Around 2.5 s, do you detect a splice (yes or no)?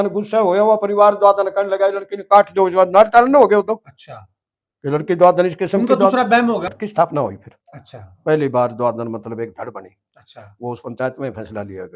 no